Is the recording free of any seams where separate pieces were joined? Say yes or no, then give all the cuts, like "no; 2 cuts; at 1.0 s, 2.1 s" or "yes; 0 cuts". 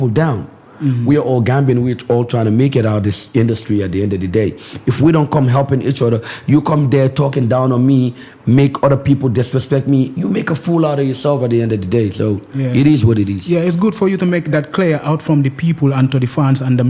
yes; 0 cuts